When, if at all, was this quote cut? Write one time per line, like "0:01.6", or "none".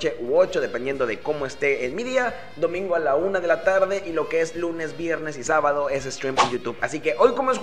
none